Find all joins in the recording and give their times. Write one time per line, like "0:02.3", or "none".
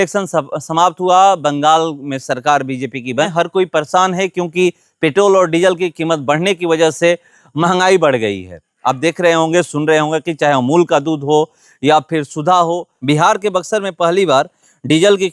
0:03.3
0:12.9